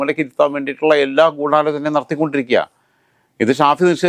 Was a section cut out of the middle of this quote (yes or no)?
no